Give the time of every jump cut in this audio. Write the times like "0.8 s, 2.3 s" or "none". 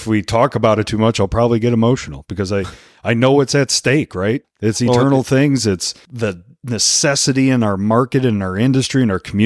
4.5 s, 6.0 s